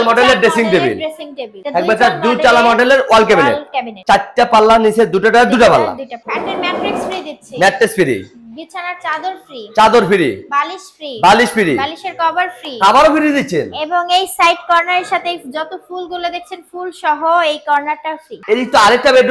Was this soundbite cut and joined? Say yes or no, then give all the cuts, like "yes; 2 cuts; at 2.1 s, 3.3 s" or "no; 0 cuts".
yes; 3 cuts; at 1.5 s, 6.2 s, 18.4 s